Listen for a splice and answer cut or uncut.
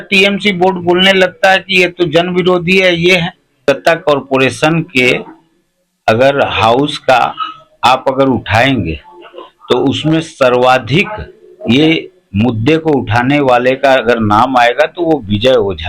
cut